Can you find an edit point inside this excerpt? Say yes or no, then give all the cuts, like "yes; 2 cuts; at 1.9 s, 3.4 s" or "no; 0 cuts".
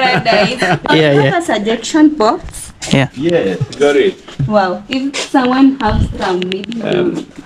no; 0 cuts